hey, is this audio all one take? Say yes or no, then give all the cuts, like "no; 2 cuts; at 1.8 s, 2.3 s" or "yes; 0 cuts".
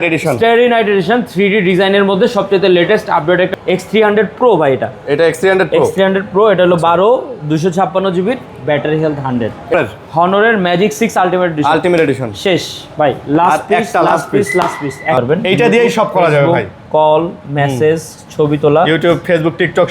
no; 3 cuts; at 3.5 s, 9.7 s, 15.2 s